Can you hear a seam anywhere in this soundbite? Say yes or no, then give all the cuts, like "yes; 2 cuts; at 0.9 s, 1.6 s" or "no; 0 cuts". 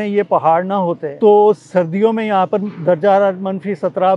yes; 1 cut; at 1.1 s